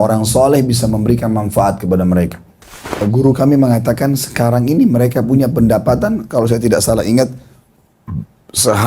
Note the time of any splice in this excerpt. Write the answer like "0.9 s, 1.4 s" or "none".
3.0 s